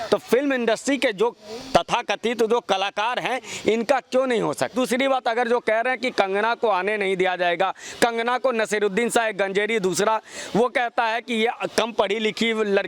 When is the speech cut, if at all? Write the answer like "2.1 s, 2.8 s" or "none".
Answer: 4.7 s